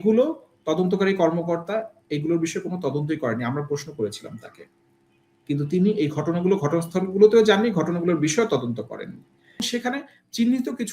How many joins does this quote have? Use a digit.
1